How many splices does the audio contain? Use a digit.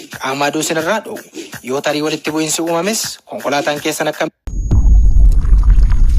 1